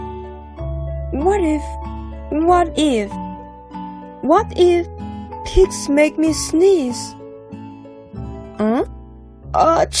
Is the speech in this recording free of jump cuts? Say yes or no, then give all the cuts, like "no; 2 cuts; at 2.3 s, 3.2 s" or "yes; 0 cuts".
yes; 0 cuts